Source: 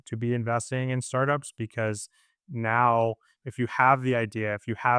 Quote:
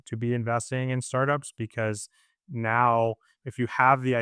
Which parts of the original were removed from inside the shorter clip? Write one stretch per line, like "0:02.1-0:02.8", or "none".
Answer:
none